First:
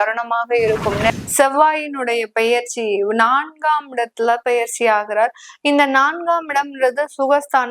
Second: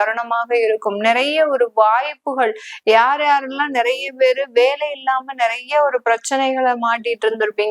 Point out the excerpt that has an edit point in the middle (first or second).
first